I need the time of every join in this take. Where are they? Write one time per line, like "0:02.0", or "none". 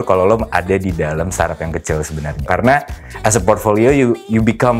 0:02.5